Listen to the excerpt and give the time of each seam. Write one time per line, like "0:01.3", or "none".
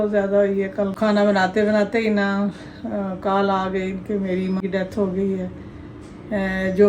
0:00.9
0:04.6